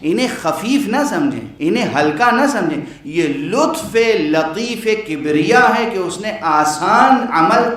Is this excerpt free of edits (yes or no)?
no